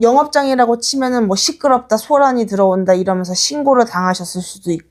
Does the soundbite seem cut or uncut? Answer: uncut